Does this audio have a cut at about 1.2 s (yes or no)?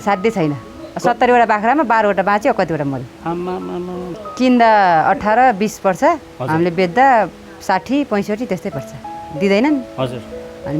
no